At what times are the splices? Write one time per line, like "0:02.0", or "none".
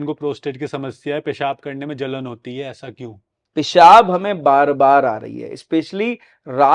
0:03.4

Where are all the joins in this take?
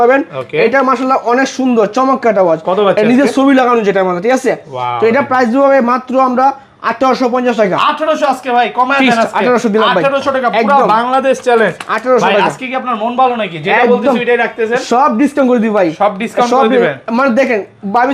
none

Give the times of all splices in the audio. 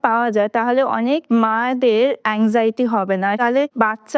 0:01.2
0:02.2
0:03.4

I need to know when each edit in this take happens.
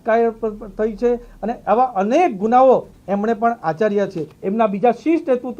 0:04.3

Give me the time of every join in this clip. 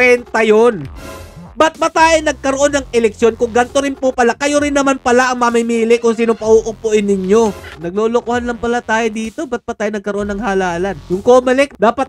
0:07.7
0:11.0

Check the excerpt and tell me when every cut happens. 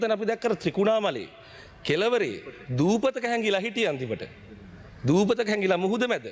none

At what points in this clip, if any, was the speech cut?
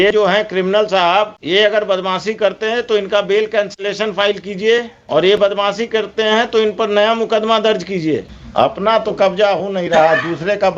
0:01.4
0:05.0
0:08.4

